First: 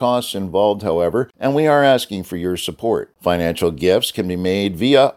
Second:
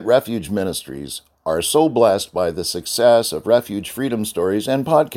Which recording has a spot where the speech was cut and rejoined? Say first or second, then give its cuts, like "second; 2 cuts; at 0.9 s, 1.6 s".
first; 2 cuts; at 1.3 s, 3.1 s